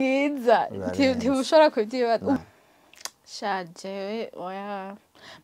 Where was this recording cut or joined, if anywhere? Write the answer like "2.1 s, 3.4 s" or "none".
2.4 s